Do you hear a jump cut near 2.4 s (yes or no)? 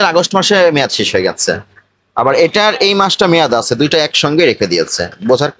no